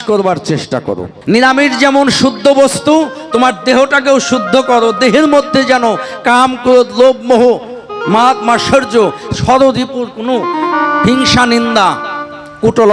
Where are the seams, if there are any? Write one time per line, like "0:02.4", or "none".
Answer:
0:01.1